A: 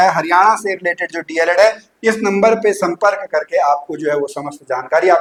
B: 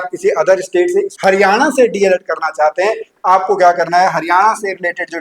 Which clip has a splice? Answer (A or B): B